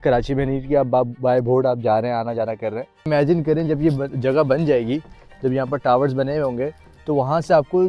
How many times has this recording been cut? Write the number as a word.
one